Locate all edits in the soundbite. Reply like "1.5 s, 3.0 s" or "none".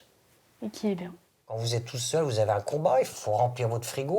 1.6 s